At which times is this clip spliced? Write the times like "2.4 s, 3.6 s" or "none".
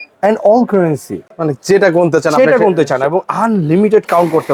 none